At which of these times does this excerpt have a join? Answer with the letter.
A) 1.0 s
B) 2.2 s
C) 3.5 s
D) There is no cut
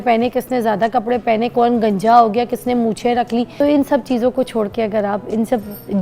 C